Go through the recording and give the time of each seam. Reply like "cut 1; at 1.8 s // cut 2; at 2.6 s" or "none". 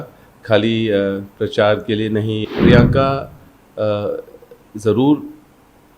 cut 1; at 2.4 s

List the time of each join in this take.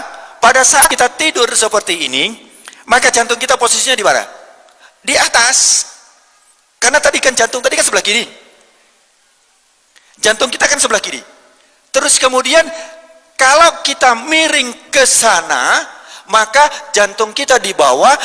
cut 1; at 0.9 s

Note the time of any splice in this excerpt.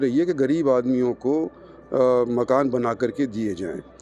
none

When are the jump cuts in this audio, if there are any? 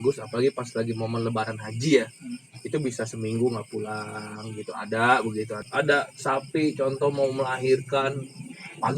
cut 1; at 5.6 s

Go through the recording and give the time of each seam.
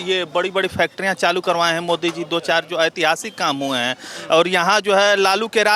none

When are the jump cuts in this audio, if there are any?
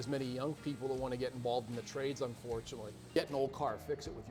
cut 1; at 3.2 s

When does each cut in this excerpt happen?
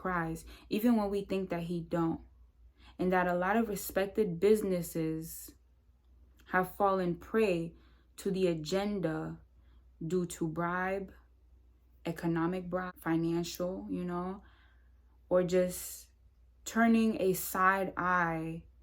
cut 1; at 12.9 s

